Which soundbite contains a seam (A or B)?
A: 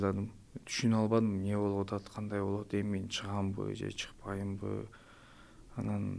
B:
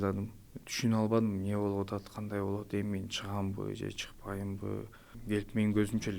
B